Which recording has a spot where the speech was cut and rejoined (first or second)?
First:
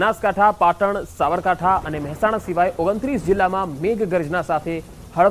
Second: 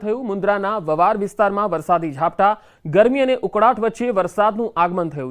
second